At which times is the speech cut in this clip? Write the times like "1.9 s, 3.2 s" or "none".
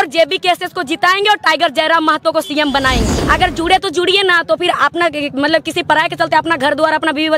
3.1 s